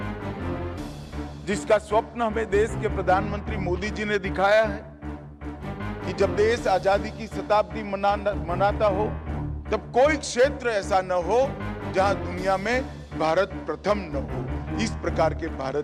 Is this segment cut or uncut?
uncut